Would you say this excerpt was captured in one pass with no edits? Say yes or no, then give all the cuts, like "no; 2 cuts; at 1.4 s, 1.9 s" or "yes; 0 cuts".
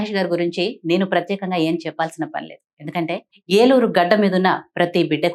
no; 1 cut; at 3.3 s